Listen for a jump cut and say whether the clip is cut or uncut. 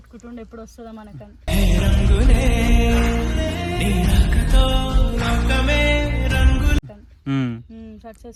uncut